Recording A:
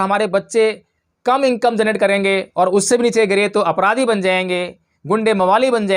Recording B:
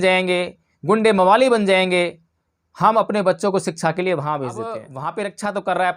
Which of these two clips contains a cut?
B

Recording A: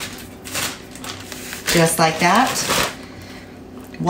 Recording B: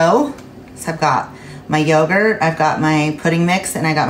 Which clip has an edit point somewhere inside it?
A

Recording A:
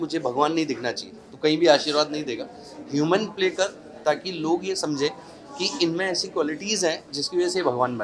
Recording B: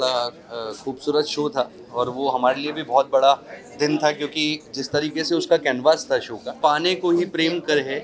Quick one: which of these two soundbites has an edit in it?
B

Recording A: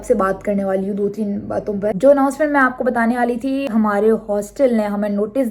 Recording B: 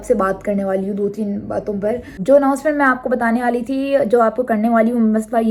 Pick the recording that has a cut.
A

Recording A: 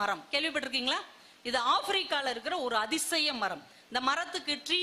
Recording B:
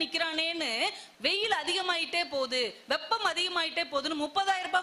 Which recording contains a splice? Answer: B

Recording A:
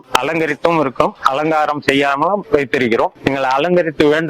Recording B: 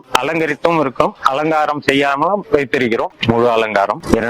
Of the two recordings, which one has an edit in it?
B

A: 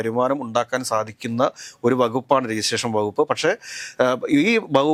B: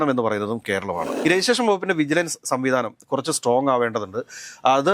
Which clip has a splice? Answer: B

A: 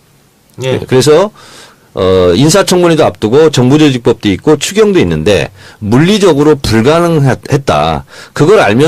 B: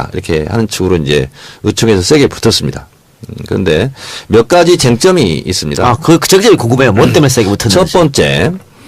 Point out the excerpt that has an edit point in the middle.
B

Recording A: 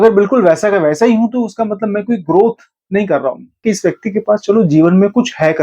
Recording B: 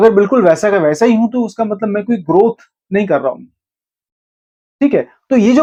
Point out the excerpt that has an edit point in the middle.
A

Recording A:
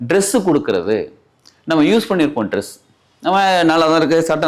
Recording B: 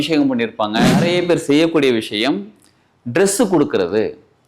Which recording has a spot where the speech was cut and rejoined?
B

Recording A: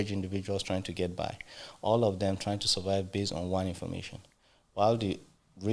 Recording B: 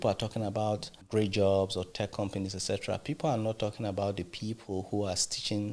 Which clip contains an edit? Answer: B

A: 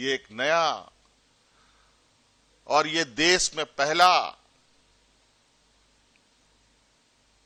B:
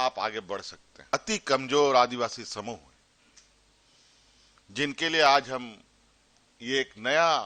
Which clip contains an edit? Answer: B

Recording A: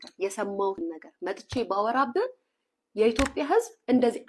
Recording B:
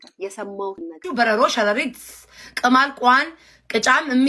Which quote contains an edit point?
B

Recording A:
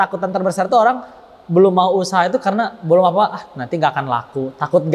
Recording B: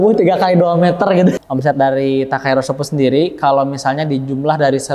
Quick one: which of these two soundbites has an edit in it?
B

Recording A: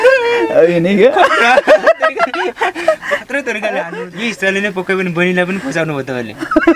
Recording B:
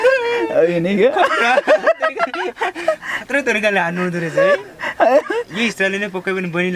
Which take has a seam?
A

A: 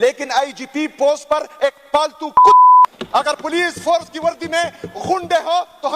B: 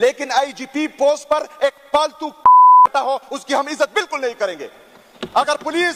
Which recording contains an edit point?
A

